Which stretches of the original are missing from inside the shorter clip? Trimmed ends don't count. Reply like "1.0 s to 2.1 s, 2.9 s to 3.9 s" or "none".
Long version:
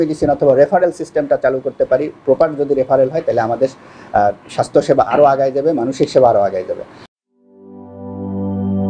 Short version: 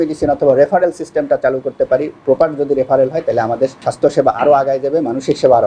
3.8 s to 4.6 s